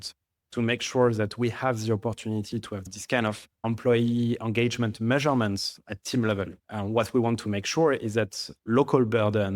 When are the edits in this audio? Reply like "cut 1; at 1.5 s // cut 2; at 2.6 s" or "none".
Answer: cut 1; at 2.8 s // cut 2; at 3.5 s // cut 3; at 6.6 s